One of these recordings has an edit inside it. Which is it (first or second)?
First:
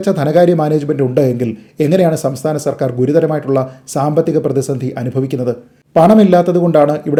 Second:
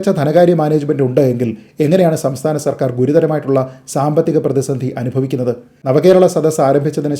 second